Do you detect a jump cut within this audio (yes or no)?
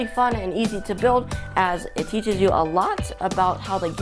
yes